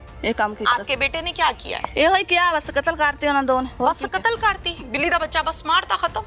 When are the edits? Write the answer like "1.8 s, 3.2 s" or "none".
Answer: 1.9 s, 3.7 s